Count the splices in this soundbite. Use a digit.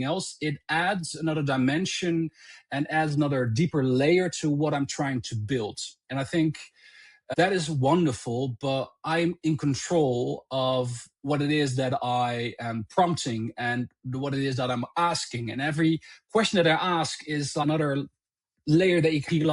0